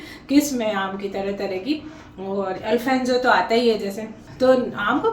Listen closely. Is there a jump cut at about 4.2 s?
yes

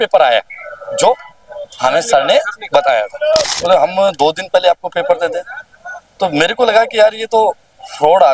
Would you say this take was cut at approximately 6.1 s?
no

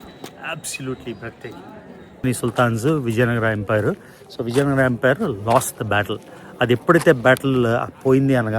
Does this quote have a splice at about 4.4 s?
no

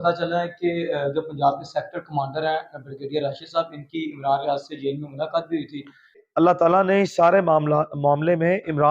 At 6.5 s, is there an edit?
yes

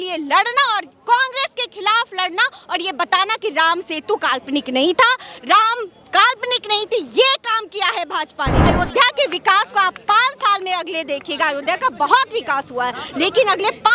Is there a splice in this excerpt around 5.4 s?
no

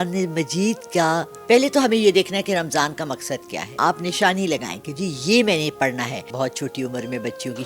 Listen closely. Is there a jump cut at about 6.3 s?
yes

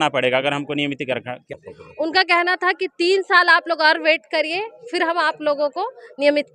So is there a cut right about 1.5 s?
yes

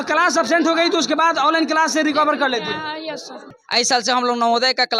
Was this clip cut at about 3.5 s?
yes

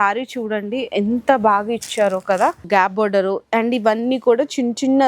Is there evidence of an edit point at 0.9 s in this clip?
no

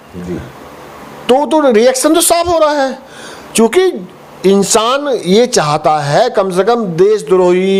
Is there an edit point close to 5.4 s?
no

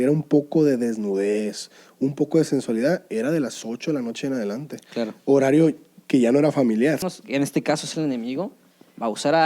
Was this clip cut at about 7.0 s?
yes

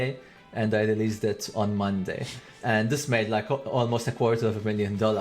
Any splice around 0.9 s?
no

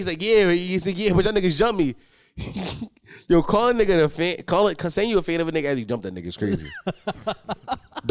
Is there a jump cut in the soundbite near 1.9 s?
no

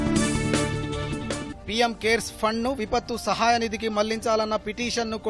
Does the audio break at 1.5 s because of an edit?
yes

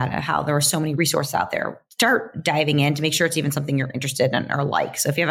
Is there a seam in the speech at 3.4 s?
no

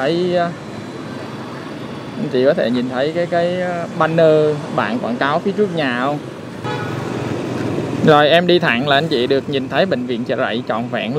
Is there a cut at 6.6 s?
yes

